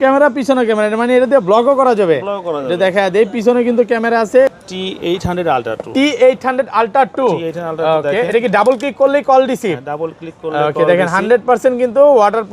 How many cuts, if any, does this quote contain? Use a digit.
1